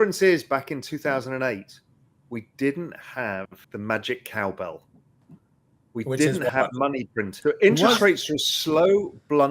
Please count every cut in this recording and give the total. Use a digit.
2